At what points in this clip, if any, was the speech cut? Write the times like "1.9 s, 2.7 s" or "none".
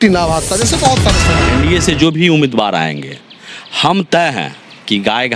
1.3 s